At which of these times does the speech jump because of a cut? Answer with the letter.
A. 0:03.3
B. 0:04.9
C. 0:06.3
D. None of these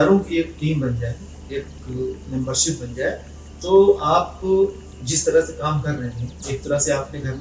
D